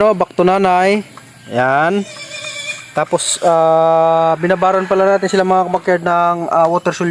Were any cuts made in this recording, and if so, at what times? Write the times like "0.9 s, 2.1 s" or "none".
none